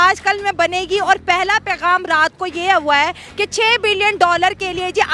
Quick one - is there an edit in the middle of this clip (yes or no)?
no